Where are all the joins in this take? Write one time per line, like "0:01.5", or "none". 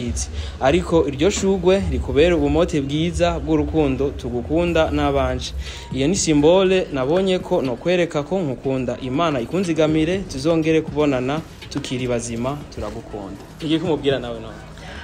0:13.4